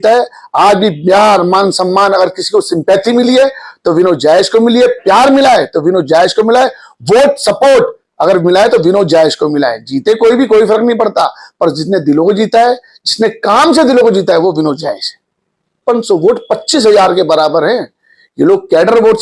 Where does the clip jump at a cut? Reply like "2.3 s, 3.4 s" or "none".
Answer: 15.8 s